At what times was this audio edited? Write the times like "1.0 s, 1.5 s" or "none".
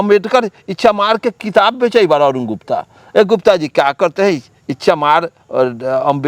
none